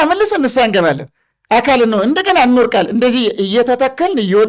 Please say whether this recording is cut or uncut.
uncut